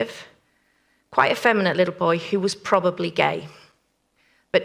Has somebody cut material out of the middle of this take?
no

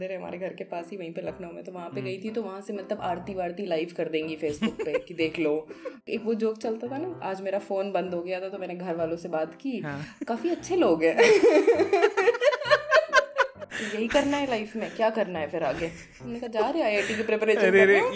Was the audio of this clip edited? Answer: yes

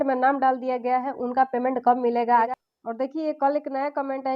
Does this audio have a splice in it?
yes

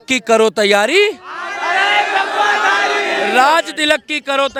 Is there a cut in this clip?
no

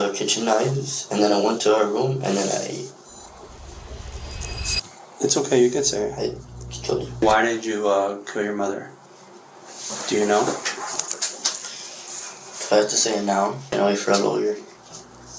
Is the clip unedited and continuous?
no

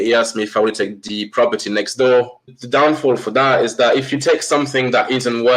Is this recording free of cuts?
no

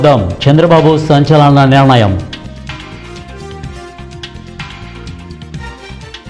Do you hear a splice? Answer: no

